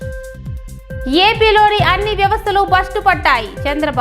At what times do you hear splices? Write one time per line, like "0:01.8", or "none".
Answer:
0:01.0